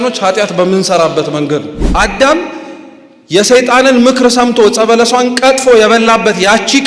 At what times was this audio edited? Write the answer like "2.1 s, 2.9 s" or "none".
2.0 s